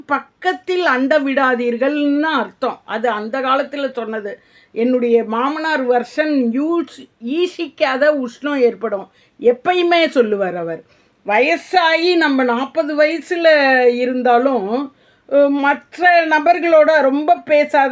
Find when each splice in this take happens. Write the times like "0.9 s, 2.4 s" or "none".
none